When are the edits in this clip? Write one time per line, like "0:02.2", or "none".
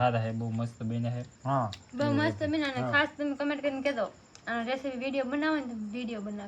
none